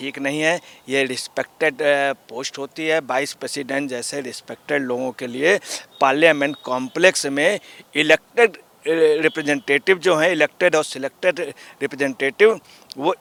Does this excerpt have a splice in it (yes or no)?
no